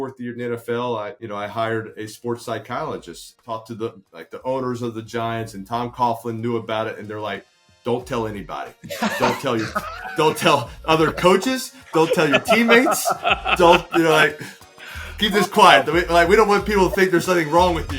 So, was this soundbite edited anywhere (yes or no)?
yes